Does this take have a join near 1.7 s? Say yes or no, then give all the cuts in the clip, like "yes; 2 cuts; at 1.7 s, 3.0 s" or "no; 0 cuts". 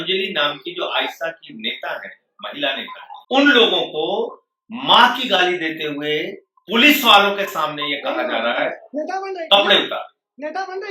no; 1 cut; at 3.1 s